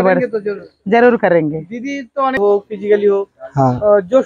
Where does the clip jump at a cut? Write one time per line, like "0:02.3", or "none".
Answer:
0:02.4